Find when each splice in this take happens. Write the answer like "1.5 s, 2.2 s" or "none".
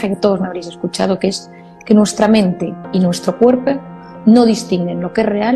none